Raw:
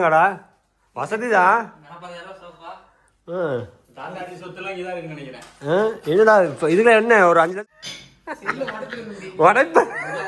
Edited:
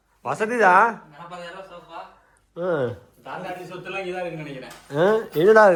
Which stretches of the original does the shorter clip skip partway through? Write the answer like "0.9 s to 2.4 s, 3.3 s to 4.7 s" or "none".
none